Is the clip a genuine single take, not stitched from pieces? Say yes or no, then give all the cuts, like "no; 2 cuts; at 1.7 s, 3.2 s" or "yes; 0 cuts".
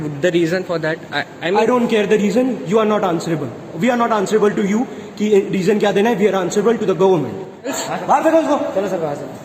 no; 1 cut; at 7.7 s